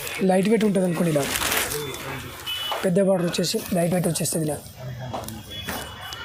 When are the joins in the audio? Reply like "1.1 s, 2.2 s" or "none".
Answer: none